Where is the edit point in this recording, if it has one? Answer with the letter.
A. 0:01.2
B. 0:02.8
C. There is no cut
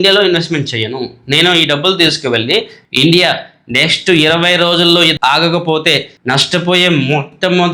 B